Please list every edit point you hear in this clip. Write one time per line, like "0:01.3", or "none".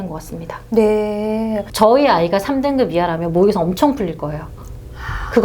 0:01.7